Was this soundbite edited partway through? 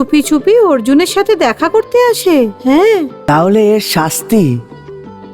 yes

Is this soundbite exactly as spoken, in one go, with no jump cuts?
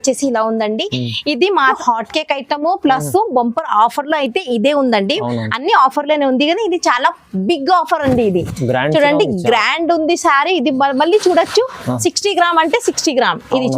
no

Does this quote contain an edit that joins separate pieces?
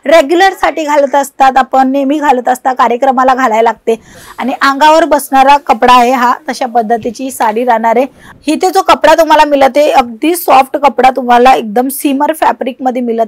yes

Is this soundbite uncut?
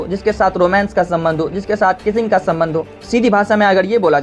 no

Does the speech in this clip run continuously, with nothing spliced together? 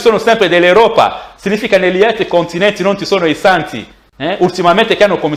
yes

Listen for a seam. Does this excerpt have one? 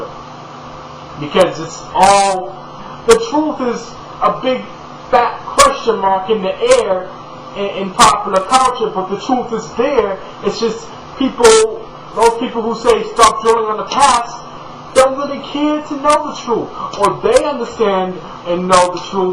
no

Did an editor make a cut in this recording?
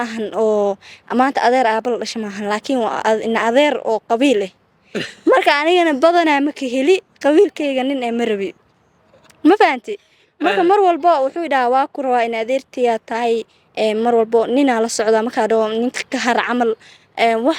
no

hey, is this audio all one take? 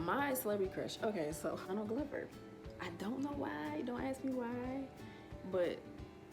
no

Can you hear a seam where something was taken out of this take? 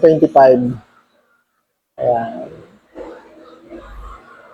no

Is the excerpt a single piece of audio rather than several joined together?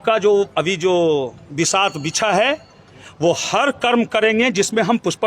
yes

